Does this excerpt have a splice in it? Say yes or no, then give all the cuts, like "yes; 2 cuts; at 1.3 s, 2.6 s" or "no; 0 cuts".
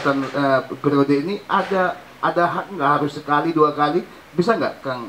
no; 0 cuts